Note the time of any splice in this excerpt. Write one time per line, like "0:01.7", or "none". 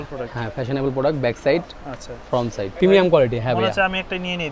0:02.7

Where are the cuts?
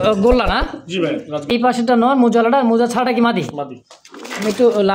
0:01.5

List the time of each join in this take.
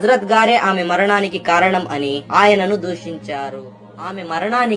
0:03.8

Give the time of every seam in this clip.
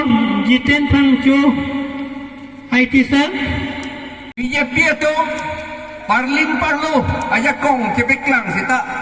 0:04.4

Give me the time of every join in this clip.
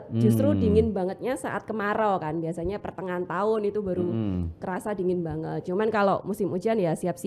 none

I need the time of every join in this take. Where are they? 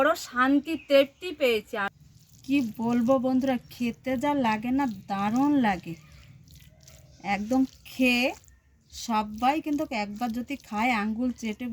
0:01.9

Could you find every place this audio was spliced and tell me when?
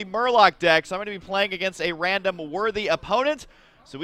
0:02.5

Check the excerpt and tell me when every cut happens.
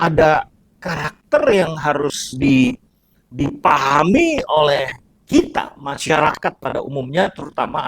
none

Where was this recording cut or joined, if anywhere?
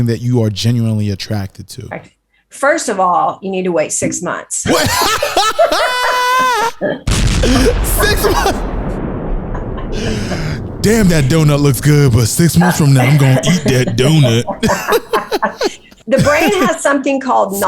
0:15.9

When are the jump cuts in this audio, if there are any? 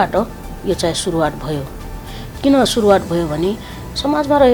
none

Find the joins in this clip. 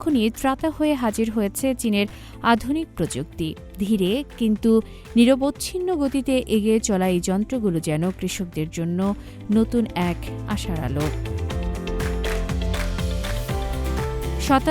none

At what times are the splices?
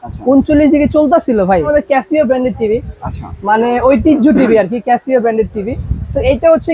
0:01.7

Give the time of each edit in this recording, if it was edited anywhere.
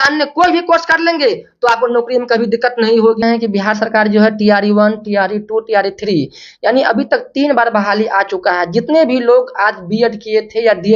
0:03.2

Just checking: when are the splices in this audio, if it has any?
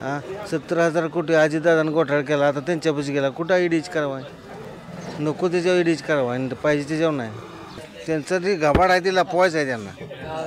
0:07.7

